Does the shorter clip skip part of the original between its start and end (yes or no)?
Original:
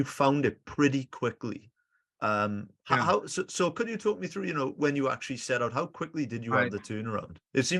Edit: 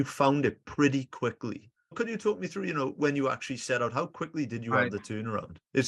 yes